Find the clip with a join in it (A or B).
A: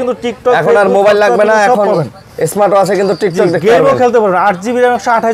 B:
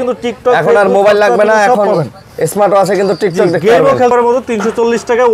B